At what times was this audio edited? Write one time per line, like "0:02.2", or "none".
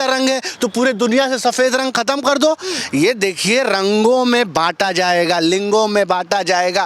none

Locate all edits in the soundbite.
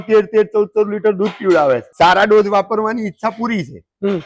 0:01.9

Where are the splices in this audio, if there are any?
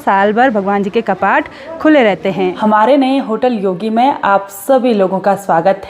0:02.6

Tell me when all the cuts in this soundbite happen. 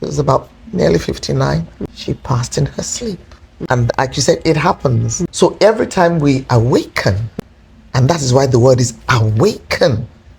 none

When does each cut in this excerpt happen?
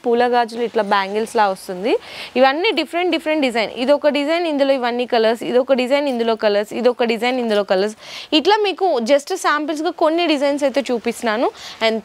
none

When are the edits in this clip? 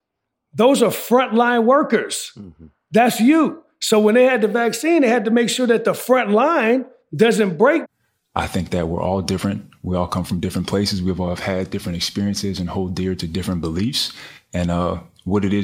0:07.9

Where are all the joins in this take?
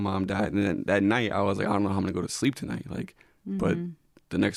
none

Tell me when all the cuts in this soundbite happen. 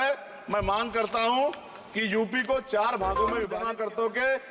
0:03.6

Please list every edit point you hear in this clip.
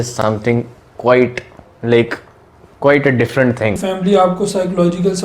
0:03.8

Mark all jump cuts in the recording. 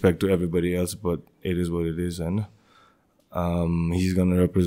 none

